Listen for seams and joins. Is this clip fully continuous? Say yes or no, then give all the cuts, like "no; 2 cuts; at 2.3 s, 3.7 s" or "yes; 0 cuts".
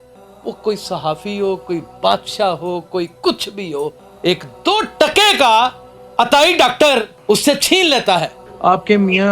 no; 1 cut; at 8.4 s